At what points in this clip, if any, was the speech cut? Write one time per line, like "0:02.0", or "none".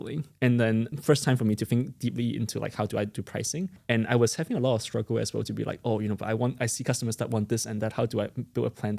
0:00.9
0:03.8